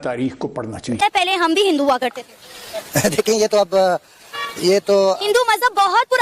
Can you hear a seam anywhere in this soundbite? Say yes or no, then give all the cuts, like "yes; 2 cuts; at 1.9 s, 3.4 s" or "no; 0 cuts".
yes; 1 cut; at 1.0 s